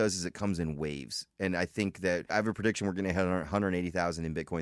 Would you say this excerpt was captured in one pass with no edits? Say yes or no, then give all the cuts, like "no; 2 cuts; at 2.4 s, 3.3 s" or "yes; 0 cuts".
no; 1 cut; at 2.3 s